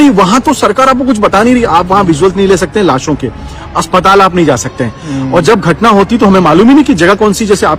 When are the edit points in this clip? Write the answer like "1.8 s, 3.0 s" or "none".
none